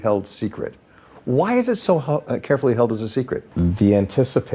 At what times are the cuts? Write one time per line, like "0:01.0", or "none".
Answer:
0:03.5